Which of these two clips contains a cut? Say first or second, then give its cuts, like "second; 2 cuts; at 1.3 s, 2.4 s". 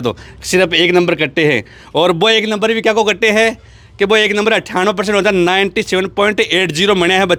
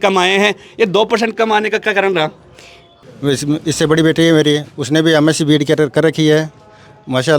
second; 1 cut; at 2.8 s